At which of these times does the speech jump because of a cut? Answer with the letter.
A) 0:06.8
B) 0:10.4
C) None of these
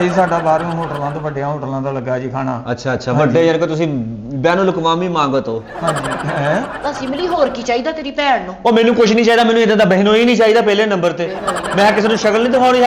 A